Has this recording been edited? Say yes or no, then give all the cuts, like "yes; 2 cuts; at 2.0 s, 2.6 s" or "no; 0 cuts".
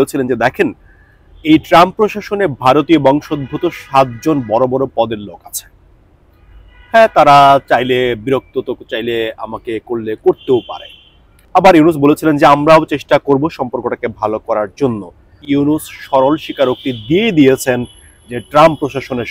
yes; 2 cuts; at 11.4 s, 15.4 s